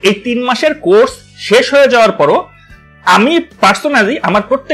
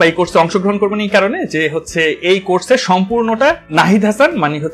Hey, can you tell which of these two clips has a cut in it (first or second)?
second